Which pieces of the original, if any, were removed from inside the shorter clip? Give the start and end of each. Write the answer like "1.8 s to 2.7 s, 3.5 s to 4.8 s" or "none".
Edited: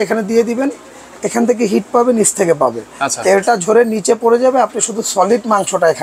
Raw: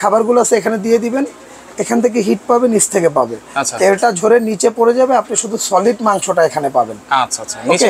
none